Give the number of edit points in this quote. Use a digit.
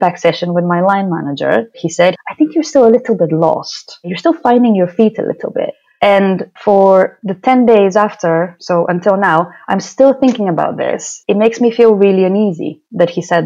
3